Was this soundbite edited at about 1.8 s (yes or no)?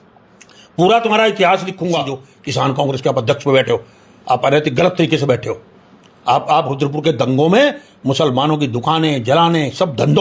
yes